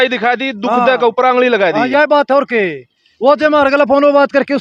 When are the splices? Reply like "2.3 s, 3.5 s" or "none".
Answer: none

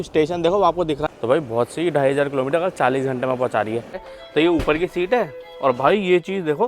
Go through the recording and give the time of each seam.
1.0 s, 4.1 s

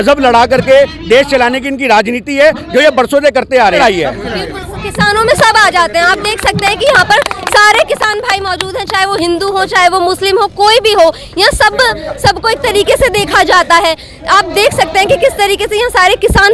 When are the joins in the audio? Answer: 3.7 s

